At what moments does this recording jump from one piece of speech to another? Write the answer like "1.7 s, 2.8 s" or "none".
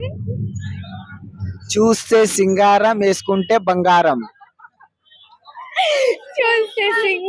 none

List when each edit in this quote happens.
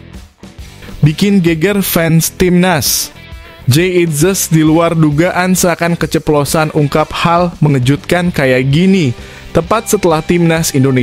1.0 s

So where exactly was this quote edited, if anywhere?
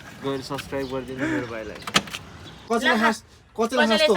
2.6 s

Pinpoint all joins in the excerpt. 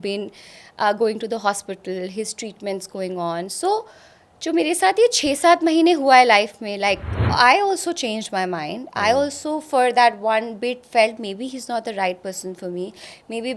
7.2 s

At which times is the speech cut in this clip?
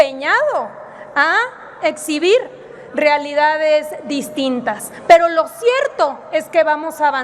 none

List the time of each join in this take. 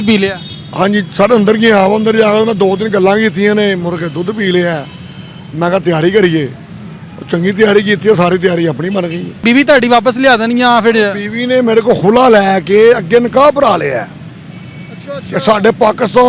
9.4 s

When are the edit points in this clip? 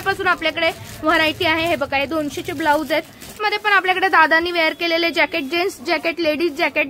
3.3 s

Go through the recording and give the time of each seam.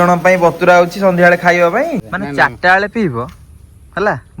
2.1 s

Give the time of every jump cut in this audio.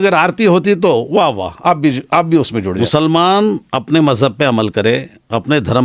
2.8 s

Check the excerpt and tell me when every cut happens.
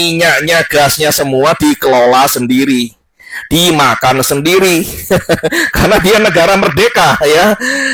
none

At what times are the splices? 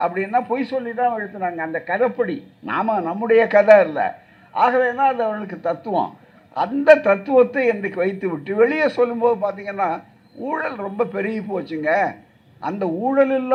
none

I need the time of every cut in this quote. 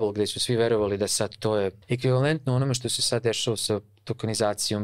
1.8 s

